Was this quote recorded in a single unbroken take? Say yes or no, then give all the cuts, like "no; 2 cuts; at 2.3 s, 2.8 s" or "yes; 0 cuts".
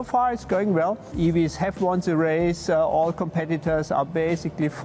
no; 1 cut; at 1.1 s